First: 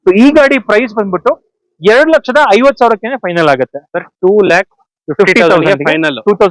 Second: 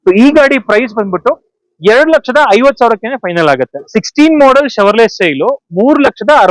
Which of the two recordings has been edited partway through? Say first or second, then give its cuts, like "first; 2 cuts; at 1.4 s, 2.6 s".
second; 1 cut; at 3.9 s